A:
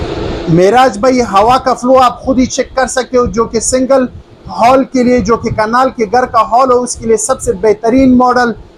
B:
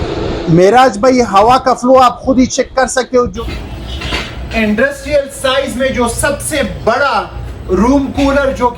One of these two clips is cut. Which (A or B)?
B